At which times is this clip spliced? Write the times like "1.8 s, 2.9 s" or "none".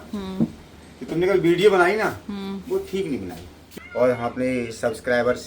3.6 s